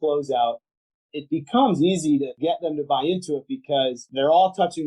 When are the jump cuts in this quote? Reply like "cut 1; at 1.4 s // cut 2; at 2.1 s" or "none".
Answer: cut 1; at 1.0 s // cut 2; at 2.3 s // cut 3; at 4.1 s